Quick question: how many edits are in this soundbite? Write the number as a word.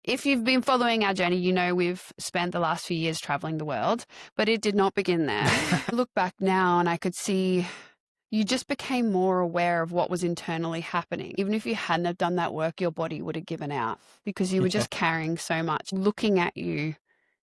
three